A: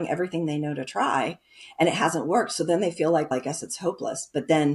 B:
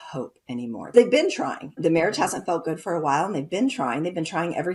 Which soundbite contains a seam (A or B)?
B